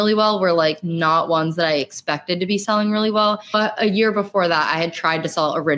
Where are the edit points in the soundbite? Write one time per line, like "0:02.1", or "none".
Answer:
0:03.5

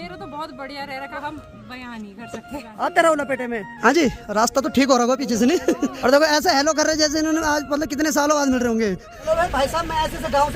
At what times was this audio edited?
0:01.1
0:02.5
0:03.7
0:06.0
0:09.1

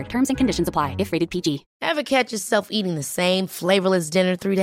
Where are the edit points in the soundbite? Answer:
0:01.7

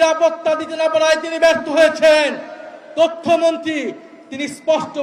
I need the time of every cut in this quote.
none

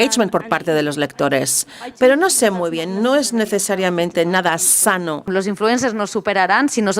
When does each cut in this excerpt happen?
0:05.3

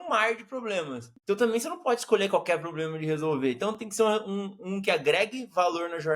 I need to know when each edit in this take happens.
0:01.1

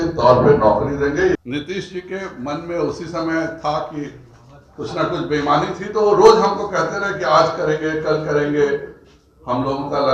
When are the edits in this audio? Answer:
0:01.3

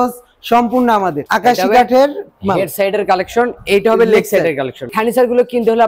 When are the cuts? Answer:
0:01.2
0:04.9

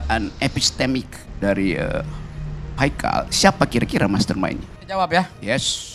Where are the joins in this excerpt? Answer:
0:01.2
0:04.7

